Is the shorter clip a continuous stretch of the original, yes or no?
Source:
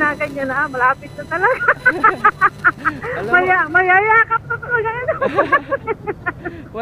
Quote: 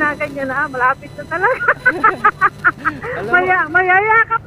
yes